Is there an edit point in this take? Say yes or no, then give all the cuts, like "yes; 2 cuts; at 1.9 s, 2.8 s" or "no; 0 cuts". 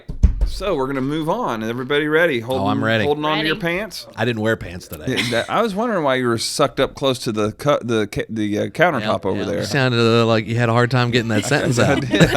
yes; 2 cuts; at 4.2 s, 9.7 s